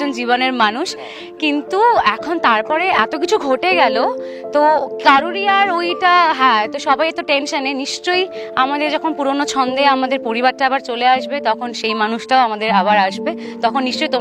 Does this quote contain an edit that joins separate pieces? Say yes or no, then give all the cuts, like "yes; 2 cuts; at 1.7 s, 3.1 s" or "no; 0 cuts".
no; 0 cuts